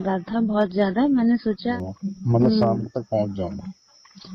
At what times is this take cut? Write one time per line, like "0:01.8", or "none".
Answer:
0:01.7